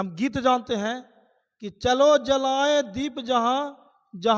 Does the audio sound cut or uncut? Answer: uncut